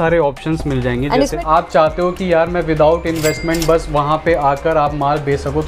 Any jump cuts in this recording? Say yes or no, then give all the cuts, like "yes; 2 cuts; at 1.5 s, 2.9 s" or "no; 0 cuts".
yes; 1 cut; at 1.4 s